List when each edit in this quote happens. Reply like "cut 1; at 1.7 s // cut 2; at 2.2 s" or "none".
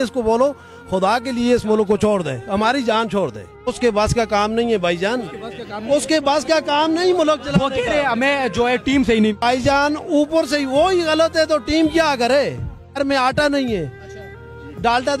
cut 1; at 3.7 s // cut 2; at 9.4 s // cut 3; at 13.0 s